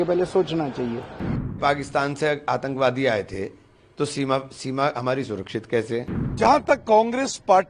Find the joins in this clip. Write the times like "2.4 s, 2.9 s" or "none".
1.6 s, 6.2 s